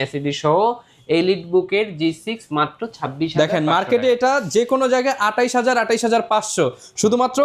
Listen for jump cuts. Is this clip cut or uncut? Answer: uncut